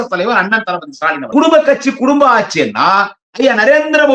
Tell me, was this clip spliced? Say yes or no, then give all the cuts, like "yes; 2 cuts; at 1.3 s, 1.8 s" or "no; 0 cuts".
yes; 1 cut; at 1.3 s